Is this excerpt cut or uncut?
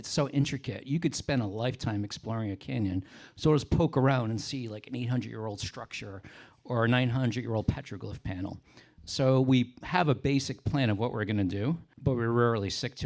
cut